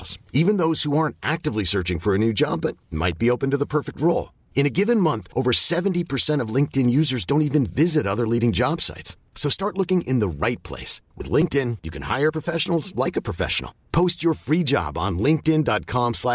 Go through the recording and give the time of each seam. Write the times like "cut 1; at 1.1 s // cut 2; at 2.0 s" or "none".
none